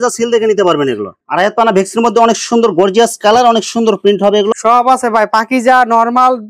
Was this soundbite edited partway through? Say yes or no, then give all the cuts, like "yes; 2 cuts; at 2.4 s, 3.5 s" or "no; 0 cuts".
yes; 2 cuts; at 1.1 s, 4.5 s